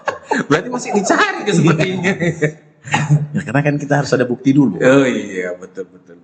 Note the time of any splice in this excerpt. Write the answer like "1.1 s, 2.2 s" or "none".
none